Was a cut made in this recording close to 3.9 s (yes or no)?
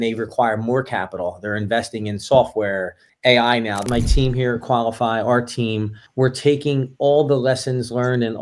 yes